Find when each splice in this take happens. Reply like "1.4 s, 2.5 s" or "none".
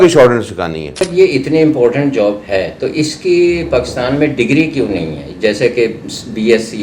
1.0 s